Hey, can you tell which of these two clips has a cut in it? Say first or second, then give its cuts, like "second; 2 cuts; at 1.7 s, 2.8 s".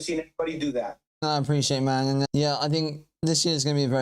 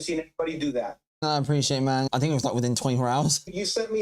second; 1 cut; at 2.1 s